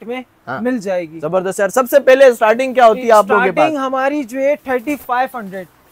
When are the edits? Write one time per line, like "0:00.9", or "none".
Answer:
none